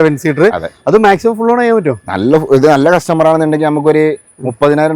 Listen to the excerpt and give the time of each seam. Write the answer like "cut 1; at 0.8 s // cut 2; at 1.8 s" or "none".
none